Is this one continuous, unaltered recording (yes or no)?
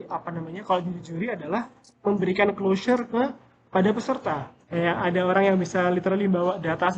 no